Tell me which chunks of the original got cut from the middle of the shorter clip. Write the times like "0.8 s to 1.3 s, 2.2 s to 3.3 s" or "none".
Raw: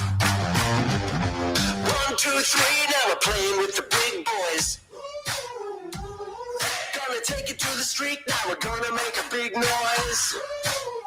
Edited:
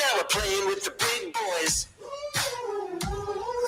none